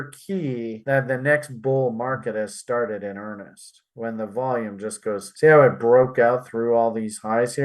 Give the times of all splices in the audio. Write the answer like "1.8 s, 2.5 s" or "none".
5.3 s